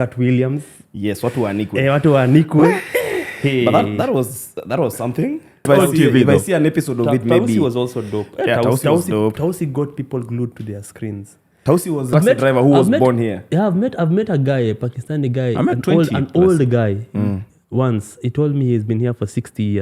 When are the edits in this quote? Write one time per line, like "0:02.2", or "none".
0:05.7
0:12.1